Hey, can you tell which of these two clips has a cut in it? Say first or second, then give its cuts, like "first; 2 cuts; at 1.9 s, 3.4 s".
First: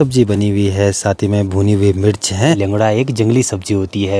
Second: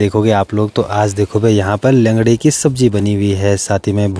first; 1 cut; at 2.6 s